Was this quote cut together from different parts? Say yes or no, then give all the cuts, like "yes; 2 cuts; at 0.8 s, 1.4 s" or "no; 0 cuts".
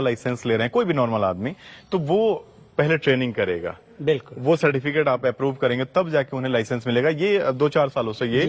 no; 0 cuts